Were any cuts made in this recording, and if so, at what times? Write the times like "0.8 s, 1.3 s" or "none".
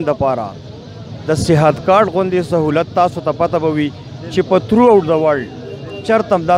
none